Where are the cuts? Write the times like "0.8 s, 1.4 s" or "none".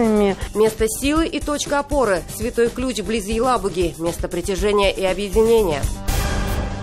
5.9 s